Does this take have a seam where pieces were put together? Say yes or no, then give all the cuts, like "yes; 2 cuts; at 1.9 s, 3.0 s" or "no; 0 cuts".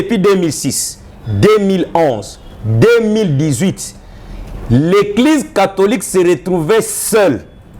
no; 0 cuts